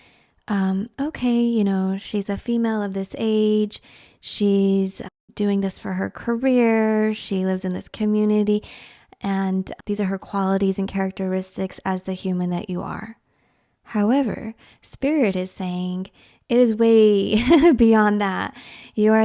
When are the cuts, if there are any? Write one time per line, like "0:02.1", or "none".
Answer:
0:05.1
0:09.7